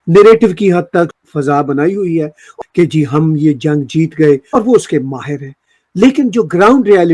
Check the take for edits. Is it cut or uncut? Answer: cut